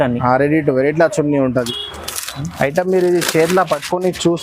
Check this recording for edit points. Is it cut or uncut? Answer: cut